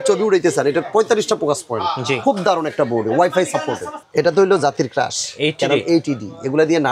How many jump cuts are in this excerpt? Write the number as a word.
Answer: one